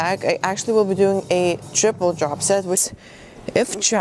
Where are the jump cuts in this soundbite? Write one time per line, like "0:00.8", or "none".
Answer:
0:02.8